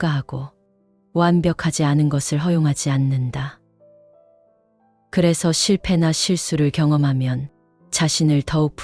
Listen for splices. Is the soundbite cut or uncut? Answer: cut